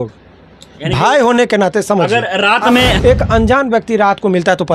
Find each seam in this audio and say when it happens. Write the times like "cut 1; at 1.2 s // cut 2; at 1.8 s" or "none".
cut 1; at 3.0 s